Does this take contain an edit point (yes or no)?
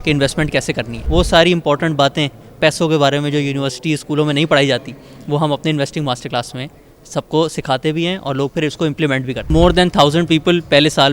yes